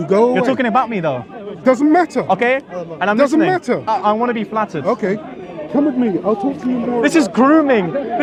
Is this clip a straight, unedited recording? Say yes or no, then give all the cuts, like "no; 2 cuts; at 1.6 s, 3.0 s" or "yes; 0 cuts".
yes; 0 cuts